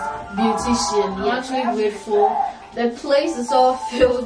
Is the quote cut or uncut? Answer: cut